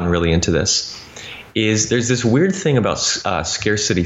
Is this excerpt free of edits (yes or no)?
yes